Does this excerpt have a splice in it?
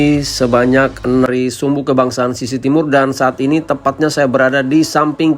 yes; 1 cut; at 1.3 s

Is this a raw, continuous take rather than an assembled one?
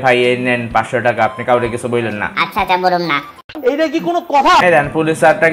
no; 1 cut; at 4.6 s

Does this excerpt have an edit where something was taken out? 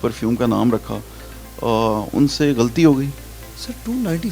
no; 0 cuts

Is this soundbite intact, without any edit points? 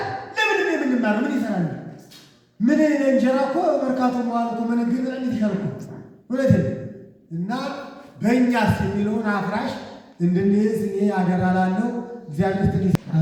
yes; 0 cuts

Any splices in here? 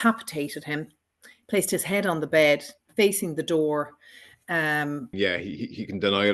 yes; 1 cut; at 5.1 s

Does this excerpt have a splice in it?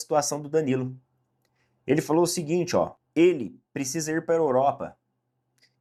no; 0 cuts

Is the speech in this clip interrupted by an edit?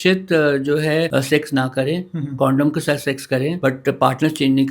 yes; 2 cuts; at 1.1 s, 3.6 s

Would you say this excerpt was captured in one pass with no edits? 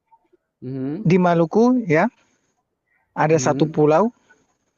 yes; 0 cuts

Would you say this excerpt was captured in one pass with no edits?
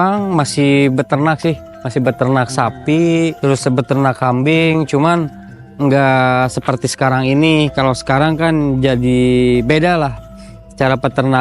no; 1 cut; at 3.4 s

